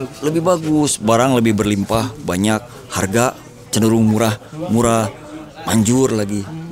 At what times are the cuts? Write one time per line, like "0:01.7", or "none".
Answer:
none